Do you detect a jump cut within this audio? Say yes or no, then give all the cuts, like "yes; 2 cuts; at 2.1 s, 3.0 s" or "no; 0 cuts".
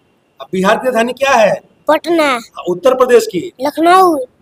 no; 0 cuts